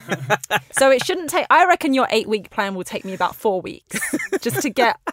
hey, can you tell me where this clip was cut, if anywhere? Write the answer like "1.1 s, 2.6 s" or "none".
none